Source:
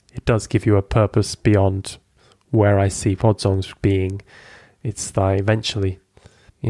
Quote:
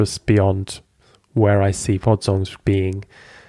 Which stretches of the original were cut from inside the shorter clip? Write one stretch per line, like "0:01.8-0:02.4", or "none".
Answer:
none